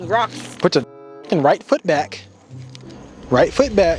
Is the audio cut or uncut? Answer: uncut